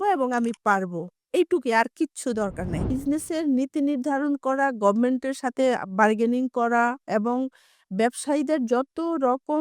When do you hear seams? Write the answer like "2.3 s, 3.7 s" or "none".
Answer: 2.9 s